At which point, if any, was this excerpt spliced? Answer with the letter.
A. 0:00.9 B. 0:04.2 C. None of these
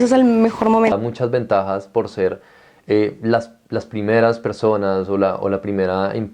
A